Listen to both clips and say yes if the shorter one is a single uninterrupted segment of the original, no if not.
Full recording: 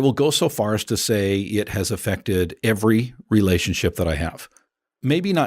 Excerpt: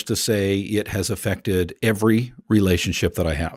yes